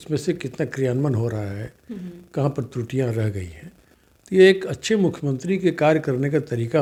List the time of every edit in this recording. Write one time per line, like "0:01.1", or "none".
none